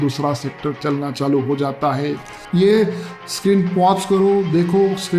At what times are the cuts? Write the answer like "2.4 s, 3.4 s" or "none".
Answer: 2.2 s